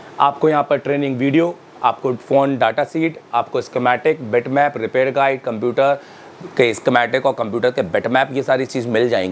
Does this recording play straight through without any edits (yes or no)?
yes